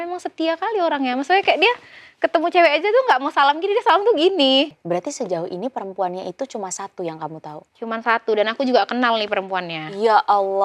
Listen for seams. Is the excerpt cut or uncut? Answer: cut